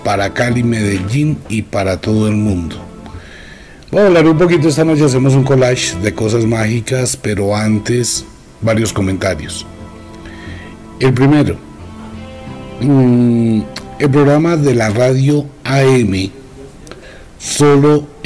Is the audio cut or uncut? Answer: uncut